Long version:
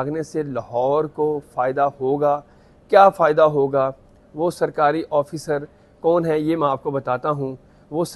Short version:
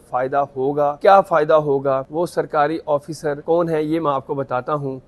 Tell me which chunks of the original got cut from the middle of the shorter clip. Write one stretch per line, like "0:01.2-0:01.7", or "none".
0:02.4-0:02.8
0:04.0-0:04.3
0:05.6-0:06.0